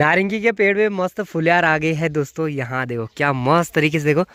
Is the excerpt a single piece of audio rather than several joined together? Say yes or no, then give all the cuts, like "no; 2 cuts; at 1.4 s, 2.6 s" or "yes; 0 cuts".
yes; 0 cuts